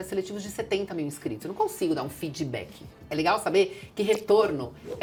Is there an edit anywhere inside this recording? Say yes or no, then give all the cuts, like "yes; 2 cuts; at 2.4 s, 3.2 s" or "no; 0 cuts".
no; 0 cuts